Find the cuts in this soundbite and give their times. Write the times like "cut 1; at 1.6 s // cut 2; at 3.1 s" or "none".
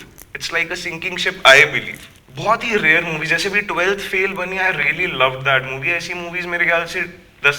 none